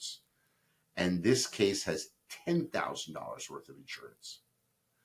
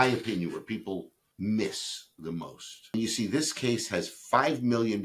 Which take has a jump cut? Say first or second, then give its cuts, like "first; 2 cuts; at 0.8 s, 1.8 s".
second; 2 cuts; at 1.2 s, 2.9 s